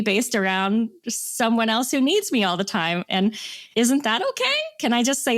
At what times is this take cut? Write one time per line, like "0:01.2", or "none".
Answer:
none